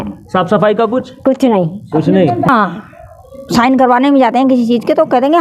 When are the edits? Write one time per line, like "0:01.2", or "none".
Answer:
0:02.5